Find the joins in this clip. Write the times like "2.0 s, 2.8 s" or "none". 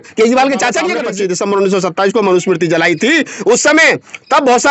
1.0 s